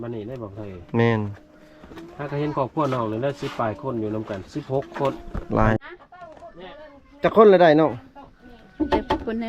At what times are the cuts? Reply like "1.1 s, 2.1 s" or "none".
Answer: 5.8 s

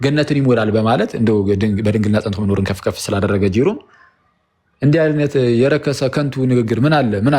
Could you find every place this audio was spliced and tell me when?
none

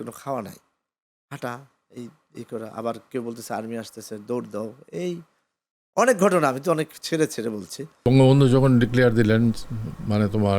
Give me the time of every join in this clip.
7.9 s

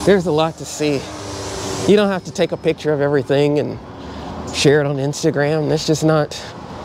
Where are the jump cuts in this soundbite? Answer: none

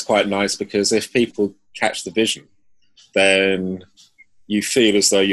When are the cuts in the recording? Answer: none

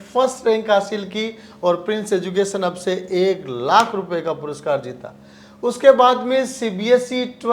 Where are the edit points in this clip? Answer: none

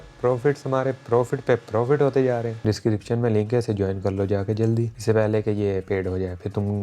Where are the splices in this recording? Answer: 2.6 s

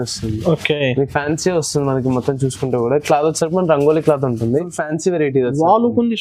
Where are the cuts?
4.6 s

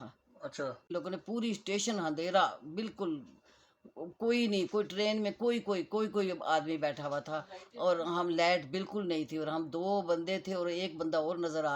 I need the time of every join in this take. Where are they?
0.9 s

